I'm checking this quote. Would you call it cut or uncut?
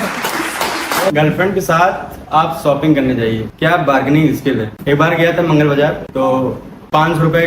cut